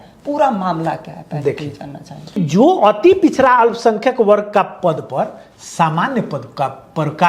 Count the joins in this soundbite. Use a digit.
1